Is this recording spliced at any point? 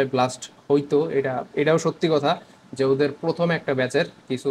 no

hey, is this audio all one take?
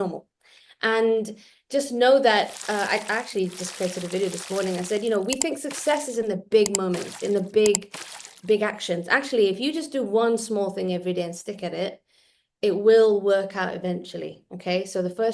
yes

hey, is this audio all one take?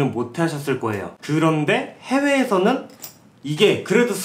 yes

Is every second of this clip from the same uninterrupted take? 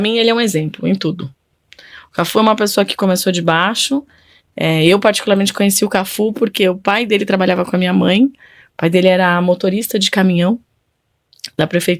yes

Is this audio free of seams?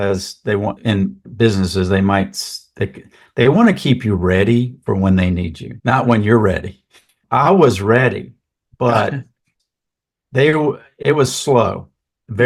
yes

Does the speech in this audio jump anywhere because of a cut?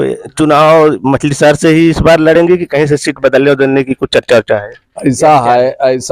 no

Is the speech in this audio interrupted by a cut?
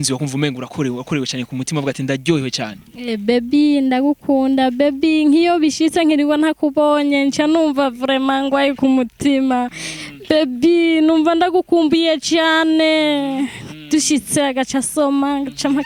no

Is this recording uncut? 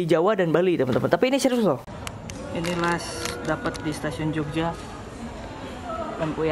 no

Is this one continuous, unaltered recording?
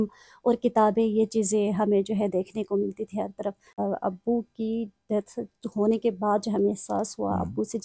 no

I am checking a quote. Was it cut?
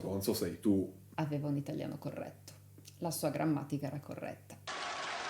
yes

